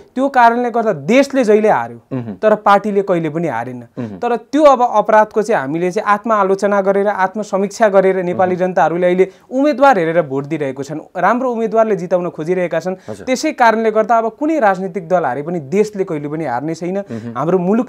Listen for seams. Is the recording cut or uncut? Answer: uncut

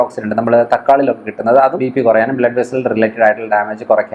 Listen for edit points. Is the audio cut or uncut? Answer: cut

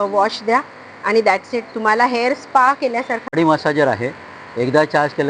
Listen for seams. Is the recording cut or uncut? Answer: cut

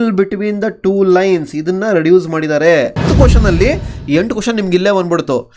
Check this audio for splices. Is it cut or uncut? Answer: cut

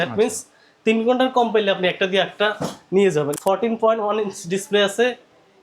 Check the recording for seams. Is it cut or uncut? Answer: cut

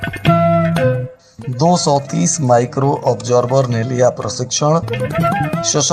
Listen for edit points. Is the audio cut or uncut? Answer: cut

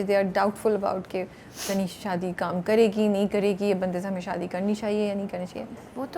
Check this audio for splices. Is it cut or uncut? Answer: uncut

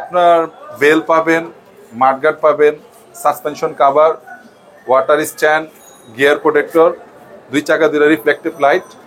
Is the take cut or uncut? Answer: uncut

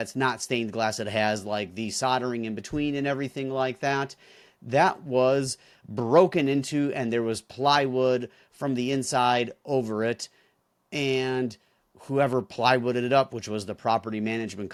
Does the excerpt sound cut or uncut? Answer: uncut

